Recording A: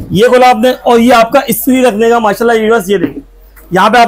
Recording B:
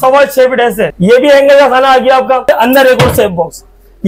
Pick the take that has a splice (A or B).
B